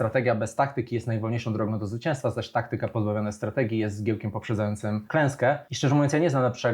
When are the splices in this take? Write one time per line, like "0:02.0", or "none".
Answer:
0:05.0
0:05.7